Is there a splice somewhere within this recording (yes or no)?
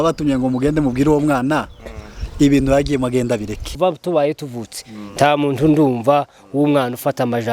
yes